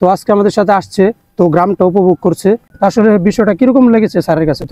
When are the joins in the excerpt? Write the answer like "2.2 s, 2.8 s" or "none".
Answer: 2.7 s